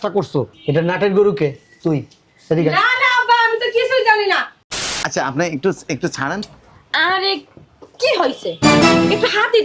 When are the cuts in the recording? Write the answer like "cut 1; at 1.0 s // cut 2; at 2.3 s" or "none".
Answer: cut 1; at 4.5 s